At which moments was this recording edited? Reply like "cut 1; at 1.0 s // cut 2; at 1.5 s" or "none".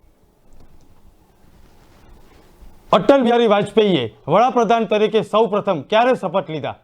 cut 1; at 3.3 s